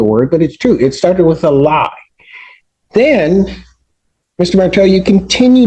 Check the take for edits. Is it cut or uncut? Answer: uncut